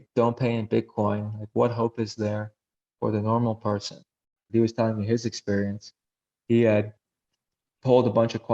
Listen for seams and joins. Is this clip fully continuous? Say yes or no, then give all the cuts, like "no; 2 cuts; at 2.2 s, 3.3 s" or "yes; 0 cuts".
no; 1 cut; at 4.4 s